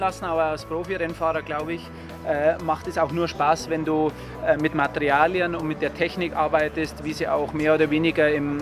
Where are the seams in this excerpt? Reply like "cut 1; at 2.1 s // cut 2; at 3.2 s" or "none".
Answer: none